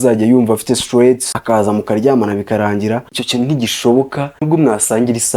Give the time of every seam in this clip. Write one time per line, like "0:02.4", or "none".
0:01.3
0:03.1
0:04.4